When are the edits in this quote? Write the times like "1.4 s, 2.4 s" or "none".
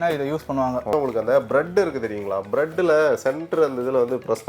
0.9 s